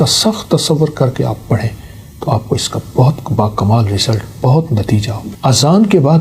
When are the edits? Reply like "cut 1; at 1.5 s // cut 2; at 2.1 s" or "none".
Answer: cut 1; at 5.2 s